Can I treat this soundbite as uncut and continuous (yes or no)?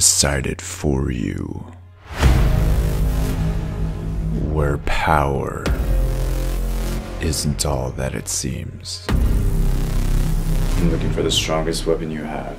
yes